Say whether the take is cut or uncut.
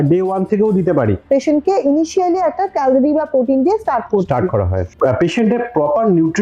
cut